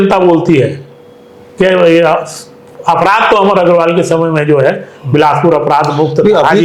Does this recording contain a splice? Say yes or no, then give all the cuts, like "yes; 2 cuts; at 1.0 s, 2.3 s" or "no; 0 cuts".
no; 0 cuts